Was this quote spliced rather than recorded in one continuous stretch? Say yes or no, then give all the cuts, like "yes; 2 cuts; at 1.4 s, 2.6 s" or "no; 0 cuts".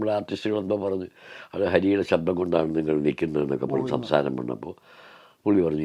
no; 0 cuts